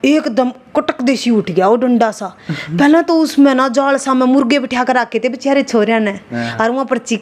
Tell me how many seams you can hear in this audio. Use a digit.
0